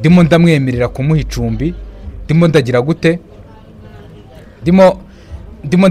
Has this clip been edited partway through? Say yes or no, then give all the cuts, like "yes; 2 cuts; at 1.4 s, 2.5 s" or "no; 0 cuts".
no; 0 cuts